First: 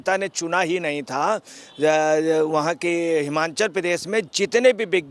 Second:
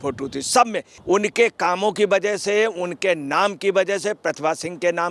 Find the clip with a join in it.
second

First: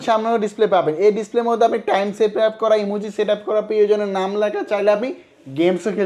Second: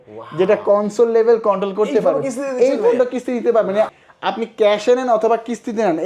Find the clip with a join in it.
second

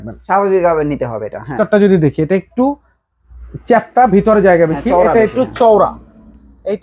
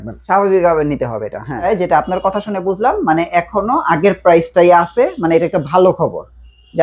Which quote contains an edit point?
first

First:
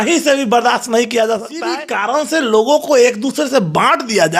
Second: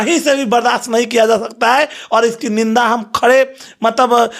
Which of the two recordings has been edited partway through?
first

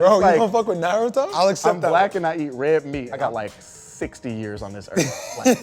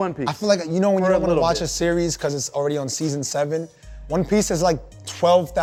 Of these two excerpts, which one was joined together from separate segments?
first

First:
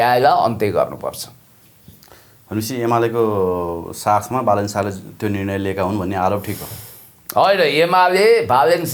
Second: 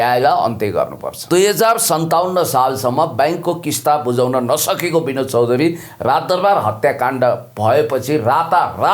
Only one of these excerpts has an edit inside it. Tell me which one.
second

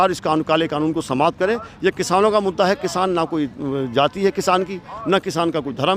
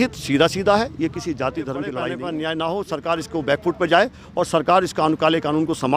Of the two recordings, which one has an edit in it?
second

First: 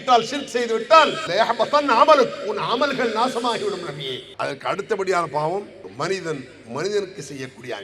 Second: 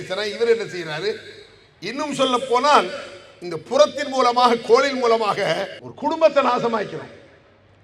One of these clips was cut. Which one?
first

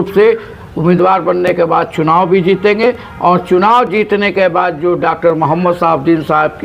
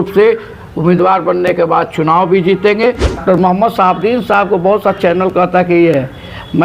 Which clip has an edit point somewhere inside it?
second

